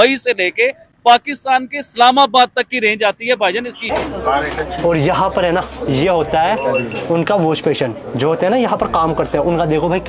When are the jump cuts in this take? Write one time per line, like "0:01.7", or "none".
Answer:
0:03.8